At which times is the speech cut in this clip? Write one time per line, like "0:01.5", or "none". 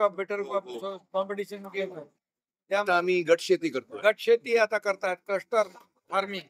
none